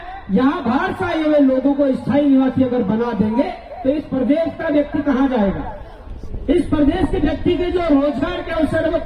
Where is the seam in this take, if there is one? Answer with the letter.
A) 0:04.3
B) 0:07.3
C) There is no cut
C